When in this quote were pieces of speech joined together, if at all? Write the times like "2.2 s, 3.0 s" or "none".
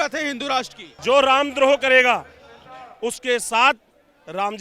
1.0 s